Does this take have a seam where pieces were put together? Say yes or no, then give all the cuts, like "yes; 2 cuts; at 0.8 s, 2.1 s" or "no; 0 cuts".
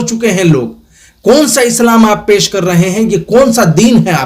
no; 0 cuts